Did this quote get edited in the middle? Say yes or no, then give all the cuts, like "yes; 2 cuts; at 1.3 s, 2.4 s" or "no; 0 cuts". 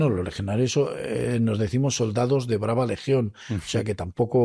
no; 0 cuts